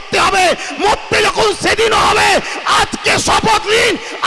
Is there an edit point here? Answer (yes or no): no